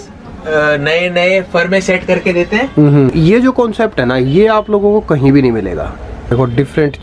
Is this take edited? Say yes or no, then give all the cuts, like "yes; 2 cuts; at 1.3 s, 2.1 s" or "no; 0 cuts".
yes; 2 cuts; at 3.1 s, 6.3 s